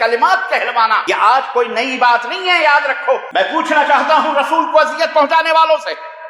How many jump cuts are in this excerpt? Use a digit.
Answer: 2